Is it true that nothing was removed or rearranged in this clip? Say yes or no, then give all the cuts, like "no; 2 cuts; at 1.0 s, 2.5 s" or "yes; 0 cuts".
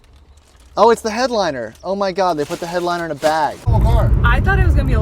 no; 1 cut; at 3.6 s